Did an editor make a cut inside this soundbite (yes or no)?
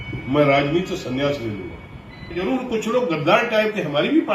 yes